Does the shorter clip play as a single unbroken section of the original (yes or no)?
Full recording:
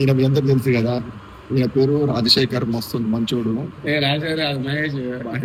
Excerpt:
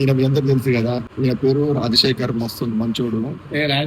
no